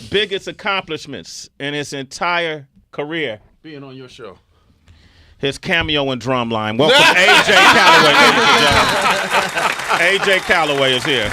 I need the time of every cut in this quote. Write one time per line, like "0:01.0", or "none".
0:09.2